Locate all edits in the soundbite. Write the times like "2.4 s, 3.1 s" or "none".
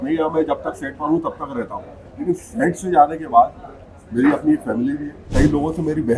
5.2 s